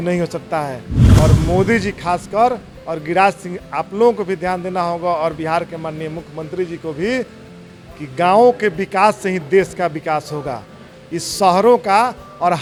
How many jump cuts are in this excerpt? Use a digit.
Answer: 0